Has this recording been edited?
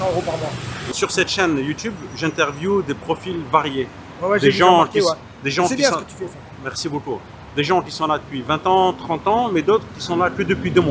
no; 0 cuts

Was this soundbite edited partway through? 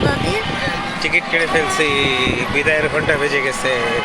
no; 0 cuts

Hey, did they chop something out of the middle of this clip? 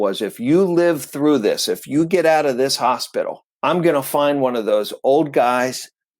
yes; 1 cut; at 3.4 s

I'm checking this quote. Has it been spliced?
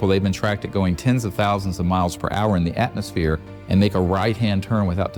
no; 0 cuts

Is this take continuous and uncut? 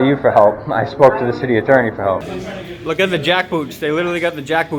no; 1 cut; at 2.3 s

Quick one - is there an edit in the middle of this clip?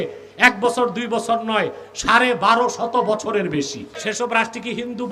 yes; 1 cut; at 4.0 s

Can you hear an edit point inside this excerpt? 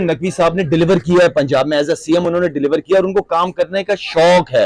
no; 0 cuts

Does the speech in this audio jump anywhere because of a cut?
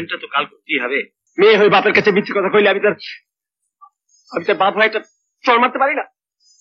yes; 1 cut; at 1.2 s

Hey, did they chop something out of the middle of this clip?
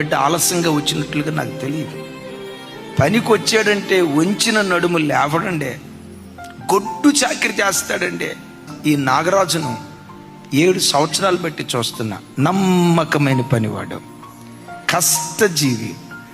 yes; 1 cut; at 10.8 s

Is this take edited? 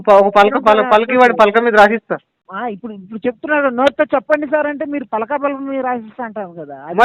yes; 1 cut; at 2.4 s

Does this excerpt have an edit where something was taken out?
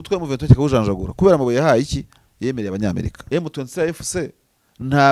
yes; 1 cut; at 3.2 s

